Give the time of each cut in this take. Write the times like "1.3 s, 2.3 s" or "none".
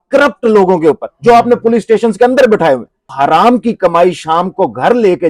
3.1 s